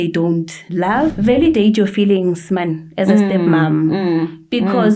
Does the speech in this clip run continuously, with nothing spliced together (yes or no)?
no